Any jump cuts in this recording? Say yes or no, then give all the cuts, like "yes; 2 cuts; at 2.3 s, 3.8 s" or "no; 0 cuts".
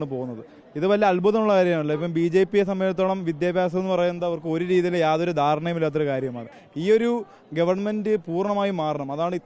no; 0 cuts